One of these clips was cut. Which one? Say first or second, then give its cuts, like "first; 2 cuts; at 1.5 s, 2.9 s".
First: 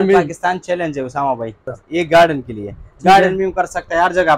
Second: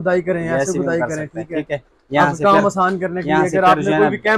first; 1 cut; at 1.7 s